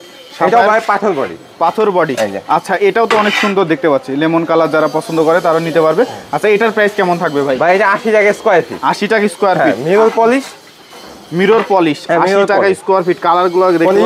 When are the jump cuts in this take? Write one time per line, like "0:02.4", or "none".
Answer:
none